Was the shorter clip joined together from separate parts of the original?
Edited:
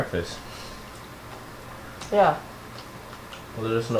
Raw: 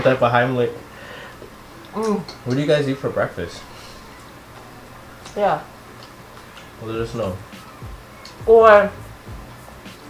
no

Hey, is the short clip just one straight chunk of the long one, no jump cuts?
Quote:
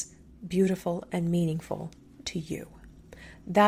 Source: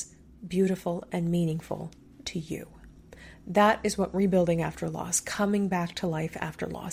yes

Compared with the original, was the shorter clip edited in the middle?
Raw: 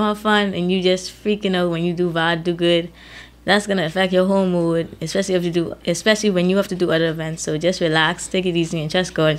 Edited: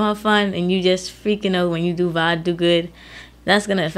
no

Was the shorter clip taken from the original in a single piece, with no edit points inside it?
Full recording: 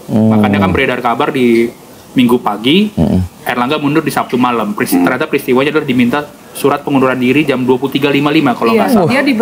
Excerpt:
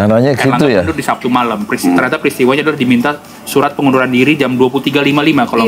yes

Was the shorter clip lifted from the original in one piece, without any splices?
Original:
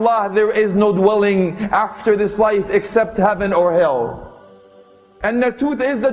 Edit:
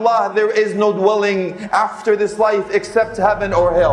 yes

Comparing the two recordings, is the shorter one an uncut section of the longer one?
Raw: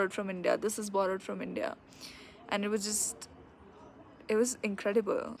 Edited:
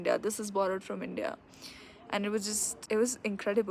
no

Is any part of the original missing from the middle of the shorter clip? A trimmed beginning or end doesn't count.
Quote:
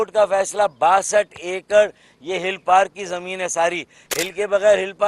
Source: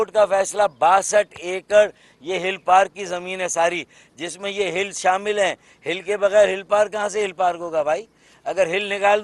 yes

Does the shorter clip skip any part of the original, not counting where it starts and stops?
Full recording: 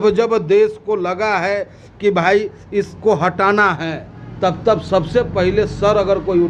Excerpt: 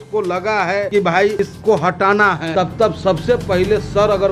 yes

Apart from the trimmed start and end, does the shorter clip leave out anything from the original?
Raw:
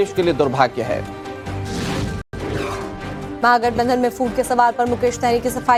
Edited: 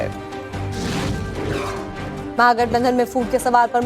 yes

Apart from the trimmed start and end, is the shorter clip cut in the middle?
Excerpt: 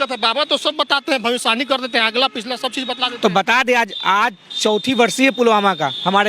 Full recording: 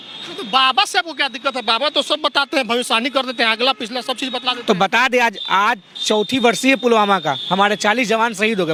no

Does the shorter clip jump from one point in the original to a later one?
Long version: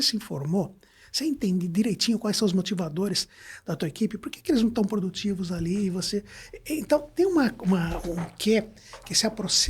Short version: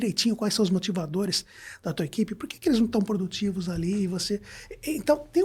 no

